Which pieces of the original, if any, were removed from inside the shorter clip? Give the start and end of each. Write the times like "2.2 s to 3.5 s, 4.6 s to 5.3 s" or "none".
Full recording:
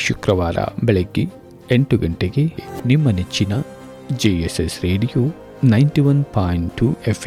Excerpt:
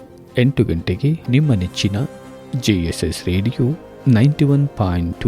2.6 s to 2.8 s

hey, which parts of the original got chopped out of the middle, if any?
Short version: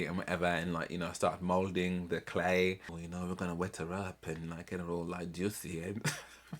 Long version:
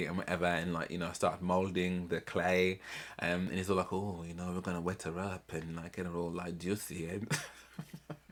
3.0 s to 4.2 s

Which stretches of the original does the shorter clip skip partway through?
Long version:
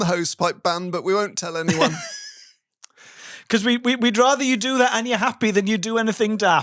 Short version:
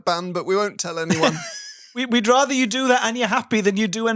2.6 s to 3.9 s

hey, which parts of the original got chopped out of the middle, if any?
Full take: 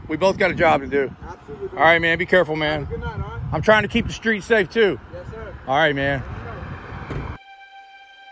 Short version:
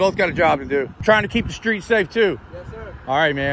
1.2 s to 3.5 s

